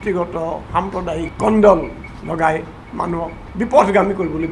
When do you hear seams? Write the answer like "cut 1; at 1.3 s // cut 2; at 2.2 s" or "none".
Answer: cut 1; at 1.3 s // cut 2; at 3.4 s

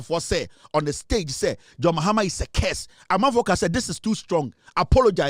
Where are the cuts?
none

